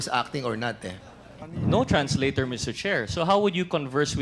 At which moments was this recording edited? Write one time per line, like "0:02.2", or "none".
0:01.4